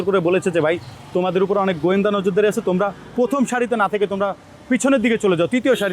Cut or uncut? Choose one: uncut